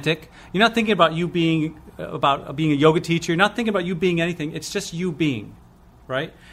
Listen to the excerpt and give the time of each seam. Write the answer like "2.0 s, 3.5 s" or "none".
none